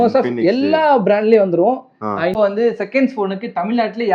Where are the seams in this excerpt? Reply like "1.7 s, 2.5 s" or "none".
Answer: 2.4 s